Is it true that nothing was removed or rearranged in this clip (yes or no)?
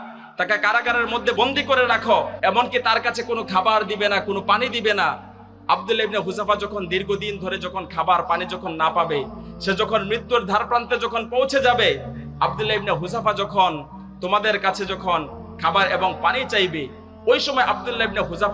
no